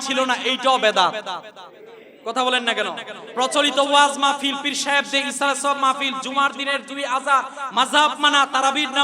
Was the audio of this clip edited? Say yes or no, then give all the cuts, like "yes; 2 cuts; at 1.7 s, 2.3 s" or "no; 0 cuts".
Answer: no; 0 cuts